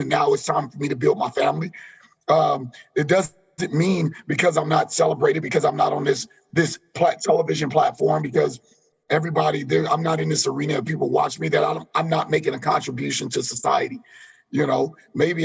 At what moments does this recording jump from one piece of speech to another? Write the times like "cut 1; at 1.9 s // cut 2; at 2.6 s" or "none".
none